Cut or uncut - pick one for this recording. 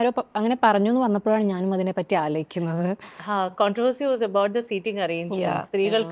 uncut